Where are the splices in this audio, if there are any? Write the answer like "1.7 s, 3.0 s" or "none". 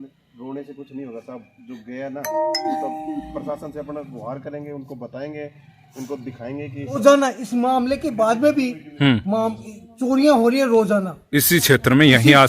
7.0 s